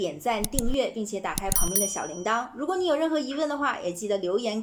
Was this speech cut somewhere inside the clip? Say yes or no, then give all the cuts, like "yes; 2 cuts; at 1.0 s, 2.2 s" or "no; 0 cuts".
no; 0 cuts